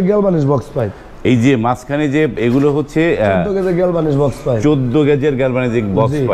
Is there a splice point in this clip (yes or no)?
no